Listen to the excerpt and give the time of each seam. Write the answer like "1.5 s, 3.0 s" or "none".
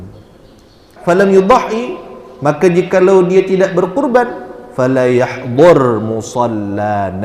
0.9 s